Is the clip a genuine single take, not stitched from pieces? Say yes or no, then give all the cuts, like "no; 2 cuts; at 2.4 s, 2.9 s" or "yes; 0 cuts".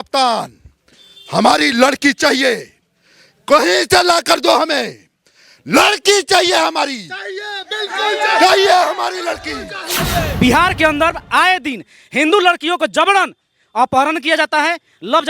no; 1 cut; at 10.3 s